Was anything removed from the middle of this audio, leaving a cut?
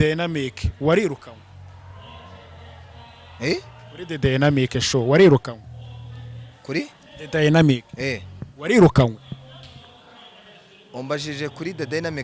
no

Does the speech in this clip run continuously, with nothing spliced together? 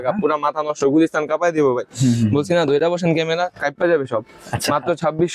yes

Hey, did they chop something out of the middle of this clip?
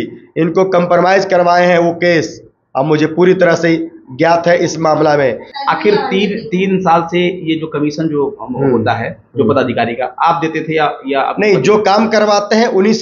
yes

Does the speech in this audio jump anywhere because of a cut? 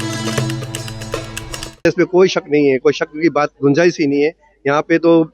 no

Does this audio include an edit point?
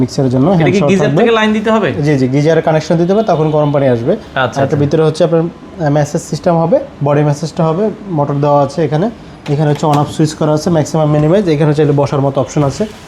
no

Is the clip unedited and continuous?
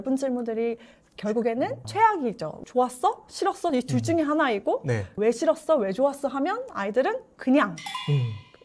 no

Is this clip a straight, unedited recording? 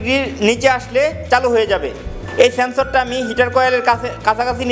no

